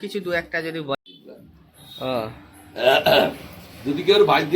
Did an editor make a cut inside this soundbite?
yes; 1 cut; at 0.9 s

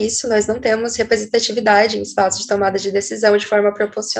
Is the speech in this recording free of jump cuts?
yes; 0 cuts

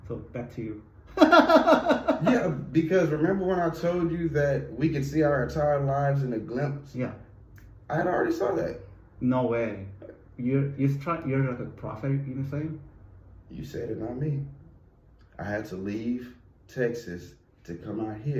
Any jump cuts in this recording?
no; 0 cuts

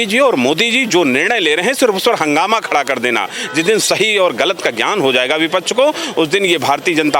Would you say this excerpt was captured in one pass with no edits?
yes; 0 cuts

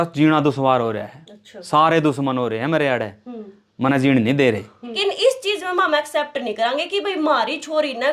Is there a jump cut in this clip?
yes; 1 cut; at 4.9 s

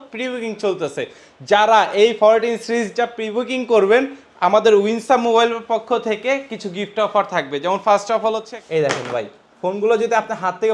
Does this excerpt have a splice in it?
yes; 1 cut; at 8.5 s

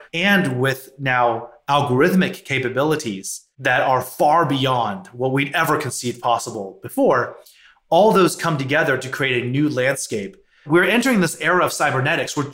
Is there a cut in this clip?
yes; 1 cut; at 10.7 s

